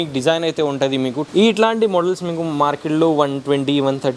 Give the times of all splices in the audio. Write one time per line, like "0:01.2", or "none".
0:01.2